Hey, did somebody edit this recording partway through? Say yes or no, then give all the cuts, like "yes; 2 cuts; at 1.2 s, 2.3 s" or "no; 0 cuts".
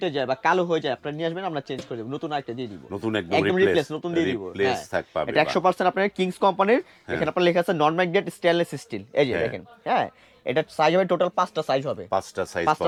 no; 0 cuts